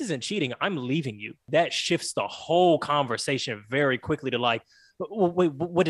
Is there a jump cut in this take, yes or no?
yes